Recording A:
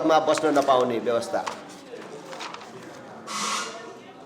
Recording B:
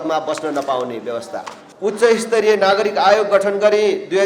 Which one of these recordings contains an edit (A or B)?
B